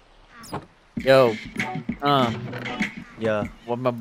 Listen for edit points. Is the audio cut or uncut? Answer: uncut